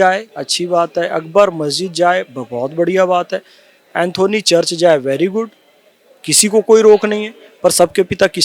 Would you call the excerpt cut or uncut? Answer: uncut